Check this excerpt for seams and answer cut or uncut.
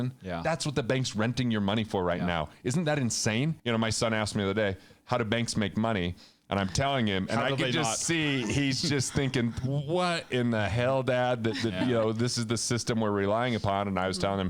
cut